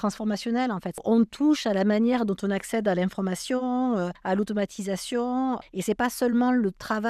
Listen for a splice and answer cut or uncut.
cut